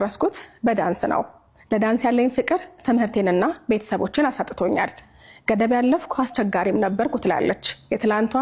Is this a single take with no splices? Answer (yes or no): yes